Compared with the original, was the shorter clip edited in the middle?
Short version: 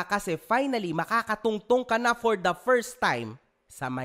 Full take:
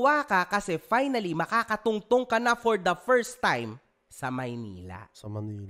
no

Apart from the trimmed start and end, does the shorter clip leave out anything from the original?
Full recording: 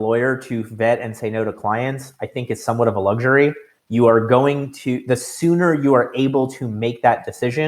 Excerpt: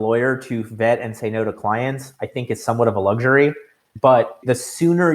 yes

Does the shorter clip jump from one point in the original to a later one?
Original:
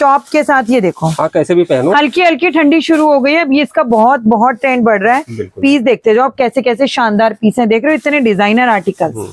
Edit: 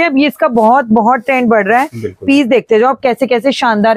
no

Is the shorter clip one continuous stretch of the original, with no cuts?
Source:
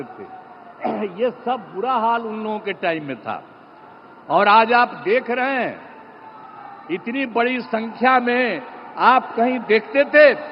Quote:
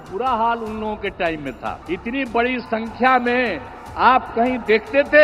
no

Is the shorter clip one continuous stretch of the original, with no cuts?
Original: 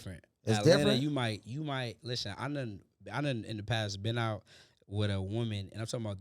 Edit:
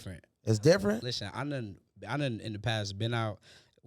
no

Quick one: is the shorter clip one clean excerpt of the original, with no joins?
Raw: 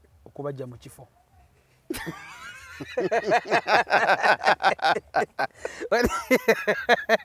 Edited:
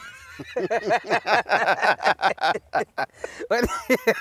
yes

